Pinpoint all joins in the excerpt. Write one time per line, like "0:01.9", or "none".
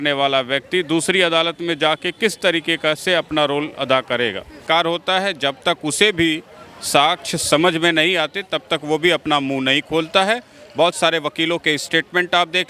0:04.6